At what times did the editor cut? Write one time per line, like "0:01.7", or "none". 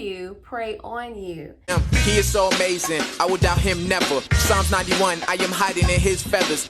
0:01.7